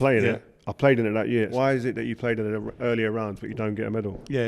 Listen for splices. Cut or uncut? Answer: cut